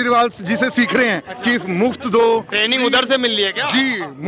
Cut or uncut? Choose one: uncut